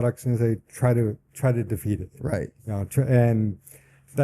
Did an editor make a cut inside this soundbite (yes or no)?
no